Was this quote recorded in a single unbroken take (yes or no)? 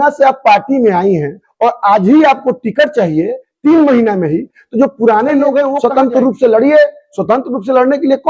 no